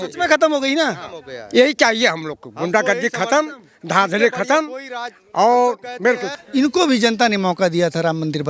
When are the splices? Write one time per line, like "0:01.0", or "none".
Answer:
0:06.4